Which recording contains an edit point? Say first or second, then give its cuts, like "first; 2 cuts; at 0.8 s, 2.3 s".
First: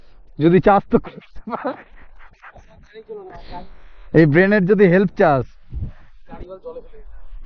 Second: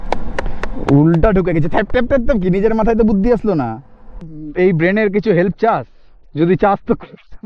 second; 1 cut; at 4.4 s